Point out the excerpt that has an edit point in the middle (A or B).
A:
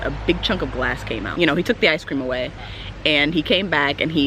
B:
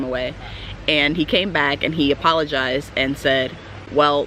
A